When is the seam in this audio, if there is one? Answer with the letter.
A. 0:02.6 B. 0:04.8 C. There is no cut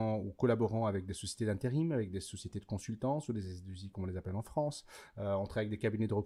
C